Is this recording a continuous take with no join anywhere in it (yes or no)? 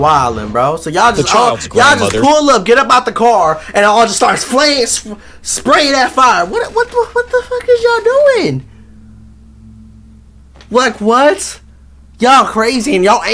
yes